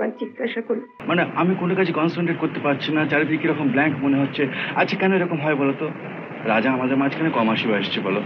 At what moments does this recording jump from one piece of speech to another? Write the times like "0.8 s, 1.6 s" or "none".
0.9 s